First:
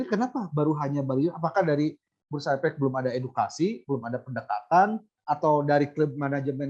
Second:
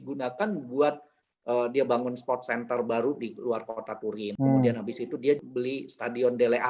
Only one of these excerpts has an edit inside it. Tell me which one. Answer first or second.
second